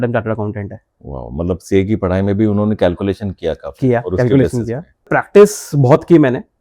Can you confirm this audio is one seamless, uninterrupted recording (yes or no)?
no